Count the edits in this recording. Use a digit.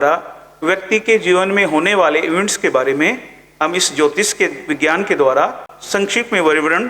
1